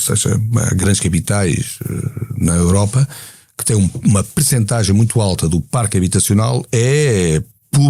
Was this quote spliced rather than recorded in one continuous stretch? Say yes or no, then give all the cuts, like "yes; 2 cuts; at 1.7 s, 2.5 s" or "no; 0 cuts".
no; 0 cuts